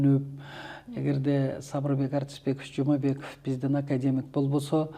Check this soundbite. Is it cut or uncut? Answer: uncut